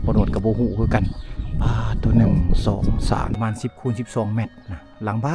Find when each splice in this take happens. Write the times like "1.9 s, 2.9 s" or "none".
3.4 s